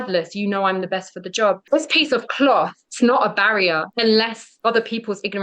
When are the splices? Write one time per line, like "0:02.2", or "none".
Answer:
0:01.6
0:02.8
0:03.9
0:04.4